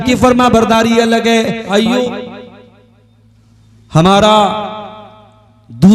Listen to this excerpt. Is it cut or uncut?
cut